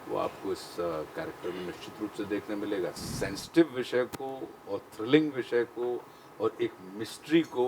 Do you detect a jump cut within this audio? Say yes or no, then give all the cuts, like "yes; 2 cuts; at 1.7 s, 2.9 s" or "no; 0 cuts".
yes; 1 cut; at 3.0 s